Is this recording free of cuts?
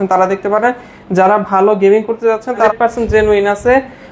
no; 1 cut; at 2.7 s

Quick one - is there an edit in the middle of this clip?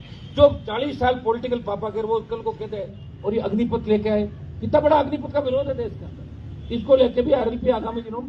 yes; 1 cut; at 3.0 s

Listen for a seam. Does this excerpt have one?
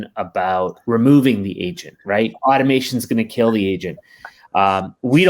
yes; 2 cuts; at 0.8 s, 2.4 s

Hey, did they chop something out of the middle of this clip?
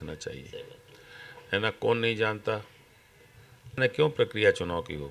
yes; 1 cut; at 3.8 s

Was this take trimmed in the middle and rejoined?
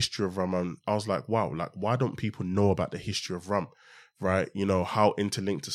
no; 0 cuts

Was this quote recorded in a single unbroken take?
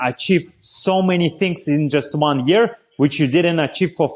yes; 0 cuts

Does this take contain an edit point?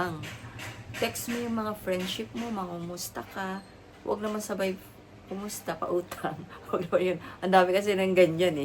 no; 0 cuts

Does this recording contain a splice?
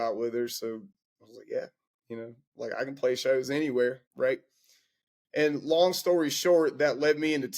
yes; 1 cut; at 4.1 s

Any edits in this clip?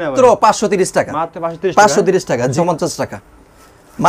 yes; 1 cut; at 2.5 s

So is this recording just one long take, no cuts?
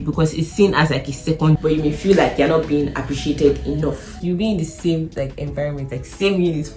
no; 2 cuts; at 1.5 s, 4.2 s

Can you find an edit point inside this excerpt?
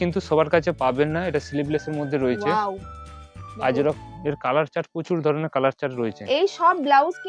no; 0 cuts

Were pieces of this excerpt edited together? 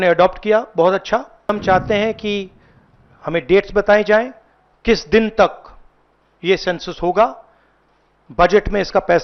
yes; 1 cut; at 1.5 s

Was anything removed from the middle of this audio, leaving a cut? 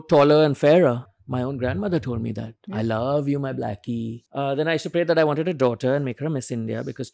yes; 2 cuts; at 1.1 s, 4.2 s

